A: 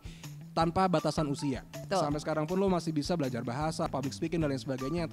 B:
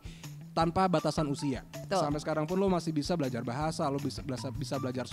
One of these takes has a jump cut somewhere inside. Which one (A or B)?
A